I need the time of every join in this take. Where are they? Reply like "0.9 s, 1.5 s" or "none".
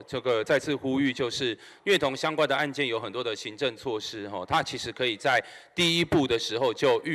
none